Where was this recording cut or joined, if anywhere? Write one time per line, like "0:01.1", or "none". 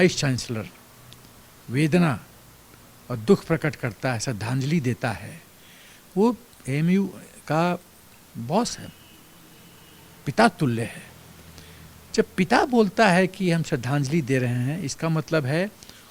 none